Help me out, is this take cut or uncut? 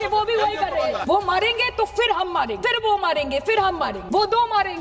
cut